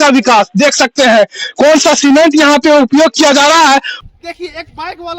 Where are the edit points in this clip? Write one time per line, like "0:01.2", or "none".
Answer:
0:03.9